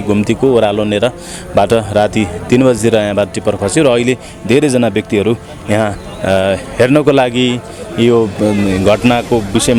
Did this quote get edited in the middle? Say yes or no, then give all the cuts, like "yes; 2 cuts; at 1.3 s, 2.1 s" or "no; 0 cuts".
no; 0 cuts